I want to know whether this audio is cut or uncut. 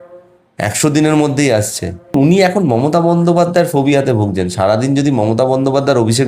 cut